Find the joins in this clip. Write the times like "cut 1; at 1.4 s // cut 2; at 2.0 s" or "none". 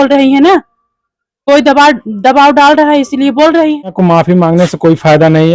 cut 1; at 3.9 s